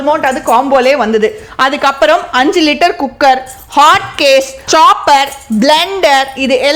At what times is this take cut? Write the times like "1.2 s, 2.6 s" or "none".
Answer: none